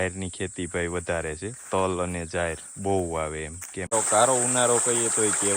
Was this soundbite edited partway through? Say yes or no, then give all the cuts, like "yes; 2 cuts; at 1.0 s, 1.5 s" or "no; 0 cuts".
yes; 1 cut; at 3.9 s